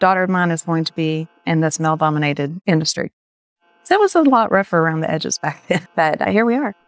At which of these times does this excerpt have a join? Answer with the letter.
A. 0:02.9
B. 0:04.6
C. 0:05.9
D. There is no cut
C